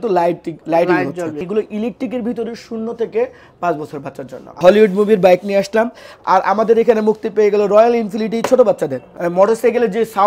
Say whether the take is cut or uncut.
cut